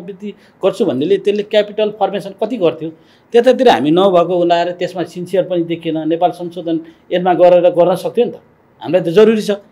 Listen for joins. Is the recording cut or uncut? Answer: uncut